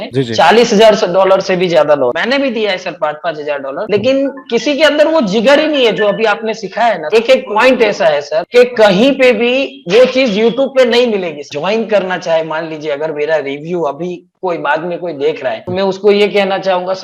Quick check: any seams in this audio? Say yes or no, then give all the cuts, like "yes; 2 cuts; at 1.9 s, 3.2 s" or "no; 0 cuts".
yes; 3 cuts; at 2.2 s, 7.0 s, 11.5 s